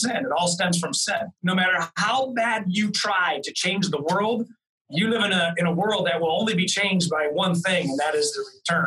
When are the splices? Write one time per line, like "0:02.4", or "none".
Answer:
0:01.3